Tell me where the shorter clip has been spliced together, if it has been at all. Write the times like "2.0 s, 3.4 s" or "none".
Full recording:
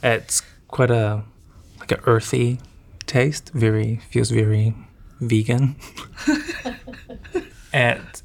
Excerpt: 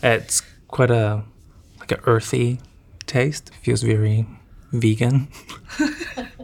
3.5 s

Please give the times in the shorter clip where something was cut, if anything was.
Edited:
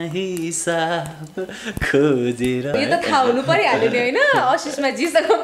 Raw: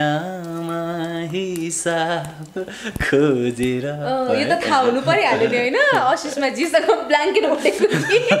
2.7 s

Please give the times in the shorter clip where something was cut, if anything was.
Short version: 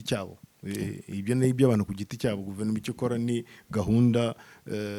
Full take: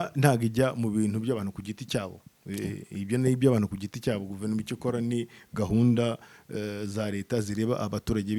none

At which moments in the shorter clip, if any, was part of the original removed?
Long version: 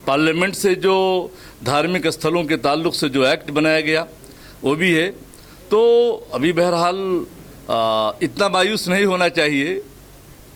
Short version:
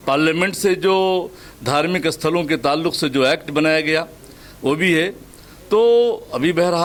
none

